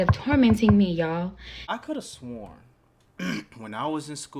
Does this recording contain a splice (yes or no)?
yes